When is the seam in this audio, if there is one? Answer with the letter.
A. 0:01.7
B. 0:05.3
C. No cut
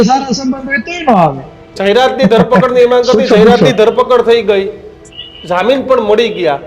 A